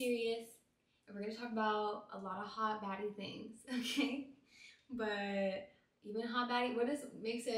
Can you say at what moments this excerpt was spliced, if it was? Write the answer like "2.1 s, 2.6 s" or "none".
none